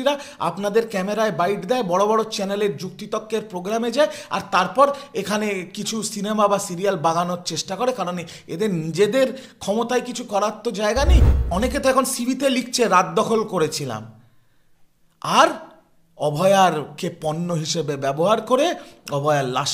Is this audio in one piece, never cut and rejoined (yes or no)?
no